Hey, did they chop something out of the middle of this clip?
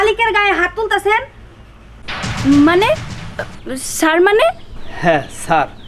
no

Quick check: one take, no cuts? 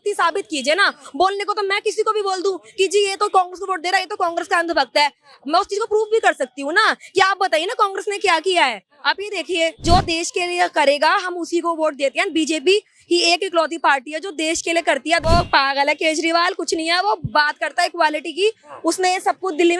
no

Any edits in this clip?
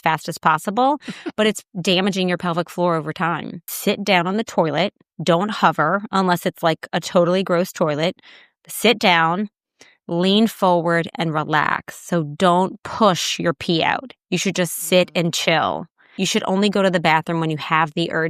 yes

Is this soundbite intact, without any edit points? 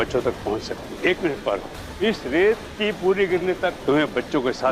no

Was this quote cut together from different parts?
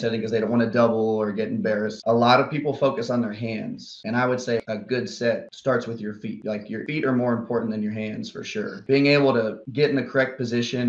yes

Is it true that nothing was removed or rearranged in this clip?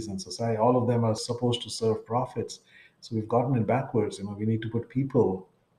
no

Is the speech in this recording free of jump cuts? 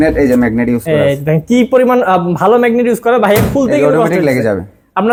yes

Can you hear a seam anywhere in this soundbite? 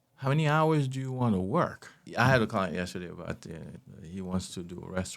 yes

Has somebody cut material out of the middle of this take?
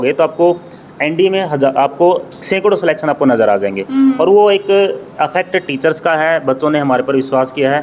no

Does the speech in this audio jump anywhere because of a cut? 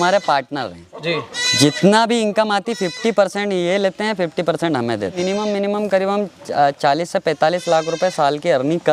yes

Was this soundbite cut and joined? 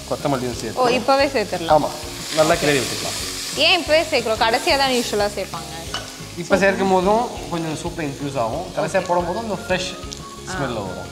no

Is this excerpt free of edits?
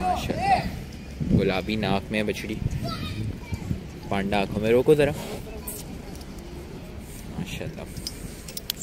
yes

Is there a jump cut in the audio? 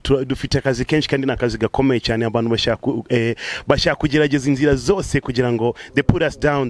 no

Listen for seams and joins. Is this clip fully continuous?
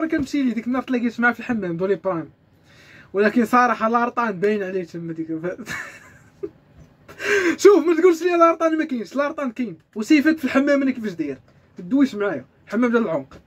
yes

